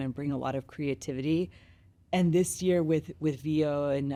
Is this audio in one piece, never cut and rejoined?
yes; 0 cuts

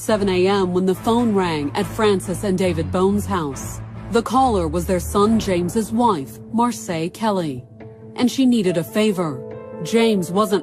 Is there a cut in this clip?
yes; 1 cut; at 2.9 s

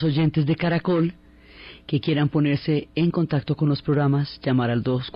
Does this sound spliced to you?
no; 0 cuts

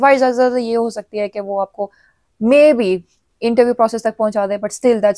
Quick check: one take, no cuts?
yes; 0 cuts

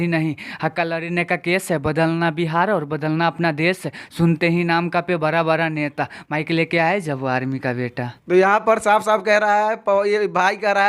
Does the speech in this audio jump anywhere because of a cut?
no; 0 cuts

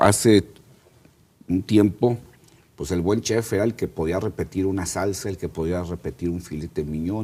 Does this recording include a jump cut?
no; 0 cuts

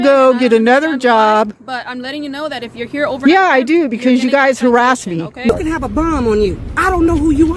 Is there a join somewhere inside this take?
yes; 1 cut; at 5.5 s

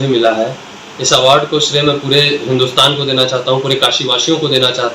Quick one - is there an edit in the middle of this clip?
no; 0 cuts

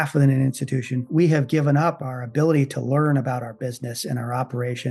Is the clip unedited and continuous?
no; 1 cut; at 1.1 s

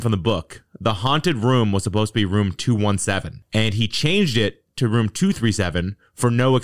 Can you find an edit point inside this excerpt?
no; 0 cuts

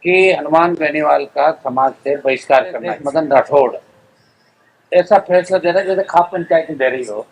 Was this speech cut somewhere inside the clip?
yes; 1 cut; at 3.0 s

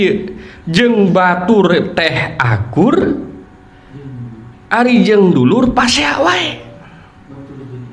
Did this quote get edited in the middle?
no; 0 cuts

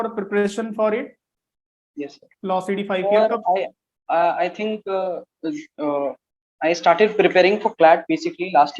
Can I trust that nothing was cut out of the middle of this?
yes; 0 cuts

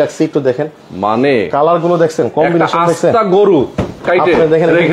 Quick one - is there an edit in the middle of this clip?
no; 0 cuts

